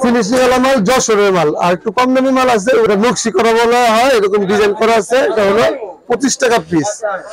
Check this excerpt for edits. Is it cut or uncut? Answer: cut